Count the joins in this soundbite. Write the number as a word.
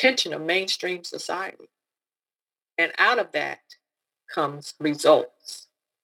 one